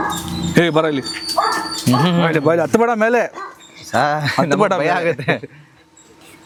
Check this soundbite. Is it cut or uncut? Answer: uncut